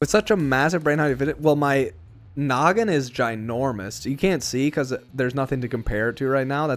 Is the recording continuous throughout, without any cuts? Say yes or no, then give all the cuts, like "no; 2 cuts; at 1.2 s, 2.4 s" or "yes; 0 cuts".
yes; 0 cuts